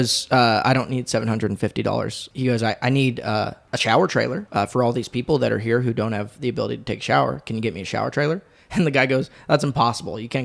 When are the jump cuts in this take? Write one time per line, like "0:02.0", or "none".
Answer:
0:02.3
0:03.6
0:04.4